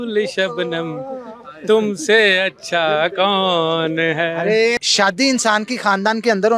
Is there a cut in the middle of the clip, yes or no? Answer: yes